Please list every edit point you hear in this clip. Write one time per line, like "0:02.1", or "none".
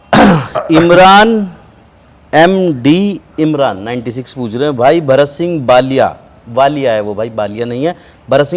none